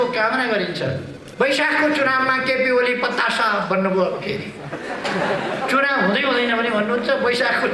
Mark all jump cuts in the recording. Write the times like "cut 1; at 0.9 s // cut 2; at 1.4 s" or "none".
cut 1; at 1.2 s